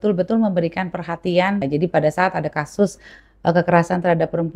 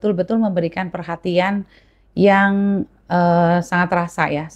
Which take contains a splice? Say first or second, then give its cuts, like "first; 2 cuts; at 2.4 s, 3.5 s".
first; 1 cut; at 1.6 s